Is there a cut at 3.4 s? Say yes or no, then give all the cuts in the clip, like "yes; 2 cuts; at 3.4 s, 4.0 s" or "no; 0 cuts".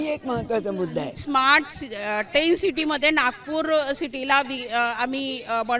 no; 1 cut; at 1.2 s